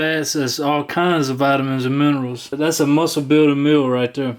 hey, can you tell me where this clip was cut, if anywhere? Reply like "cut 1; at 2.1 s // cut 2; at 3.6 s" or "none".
cut 1; at 2.4 s